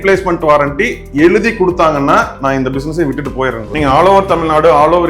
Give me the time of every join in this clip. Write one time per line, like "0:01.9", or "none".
0:03.7